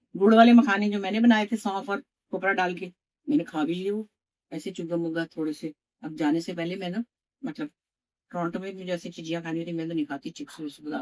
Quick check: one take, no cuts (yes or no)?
yes